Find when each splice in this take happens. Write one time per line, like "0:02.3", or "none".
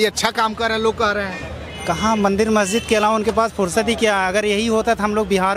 none